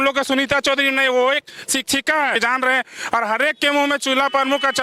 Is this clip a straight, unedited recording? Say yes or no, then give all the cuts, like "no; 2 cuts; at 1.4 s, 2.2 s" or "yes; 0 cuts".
no; 1 cut; at 2.3 s